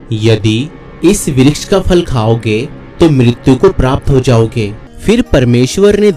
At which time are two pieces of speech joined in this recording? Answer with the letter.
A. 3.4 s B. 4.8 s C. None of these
B